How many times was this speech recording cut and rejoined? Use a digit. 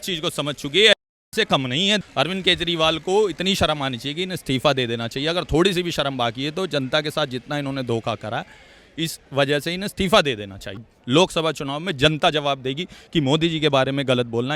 2